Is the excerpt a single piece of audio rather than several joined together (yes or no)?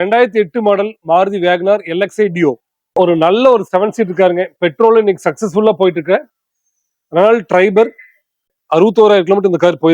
no